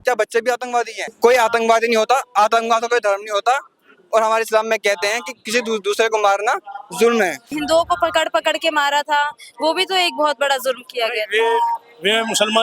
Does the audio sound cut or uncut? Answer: cut